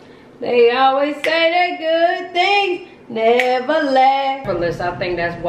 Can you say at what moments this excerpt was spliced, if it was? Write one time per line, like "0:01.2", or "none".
0:04.5